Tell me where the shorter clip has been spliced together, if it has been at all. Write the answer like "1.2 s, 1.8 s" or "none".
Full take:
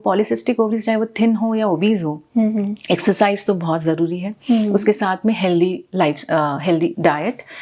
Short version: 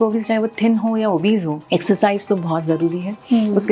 1.6 s